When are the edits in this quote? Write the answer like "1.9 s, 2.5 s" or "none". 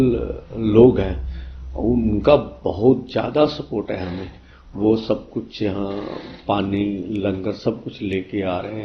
none